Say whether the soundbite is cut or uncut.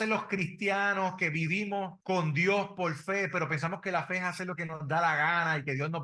uncut